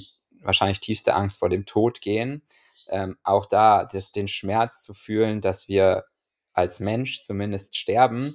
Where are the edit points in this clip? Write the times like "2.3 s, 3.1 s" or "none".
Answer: none